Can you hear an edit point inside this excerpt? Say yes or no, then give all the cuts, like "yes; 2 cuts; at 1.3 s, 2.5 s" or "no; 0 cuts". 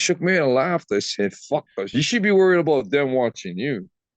yes; 1 cut; at 1.8 s